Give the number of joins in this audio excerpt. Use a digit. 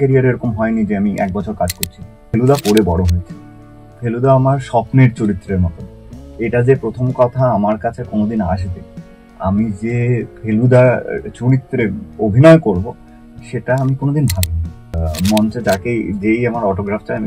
2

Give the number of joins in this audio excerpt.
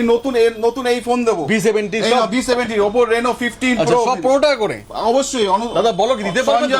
0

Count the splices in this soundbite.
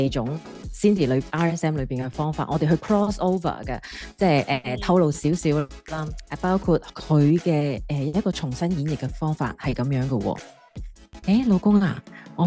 1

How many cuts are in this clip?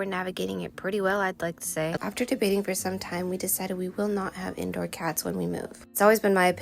2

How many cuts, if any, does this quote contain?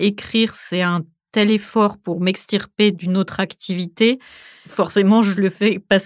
0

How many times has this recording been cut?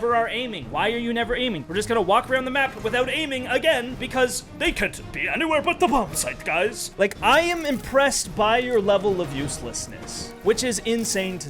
3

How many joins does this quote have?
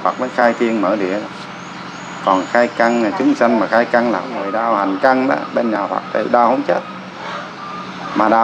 1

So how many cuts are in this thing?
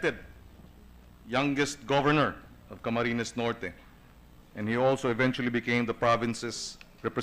1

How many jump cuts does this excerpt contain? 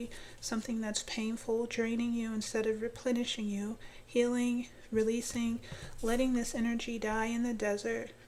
0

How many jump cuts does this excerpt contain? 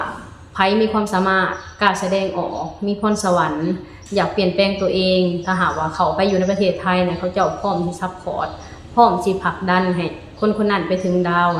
0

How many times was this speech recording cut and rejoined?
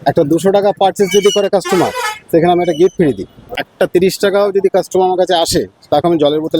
1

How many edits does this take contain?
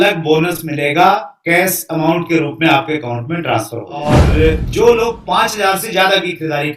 1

